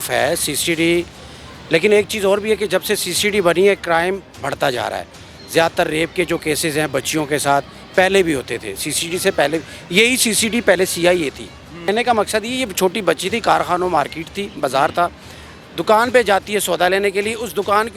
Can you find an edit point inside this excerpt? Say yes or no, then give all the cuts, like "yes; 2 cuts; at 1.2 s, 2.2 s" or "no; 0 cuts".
yes; 1 cut; at 11.9 s